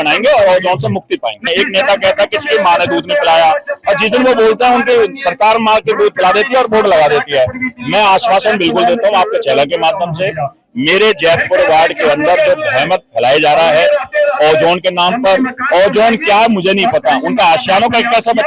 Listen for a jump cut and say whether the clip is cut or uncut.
cut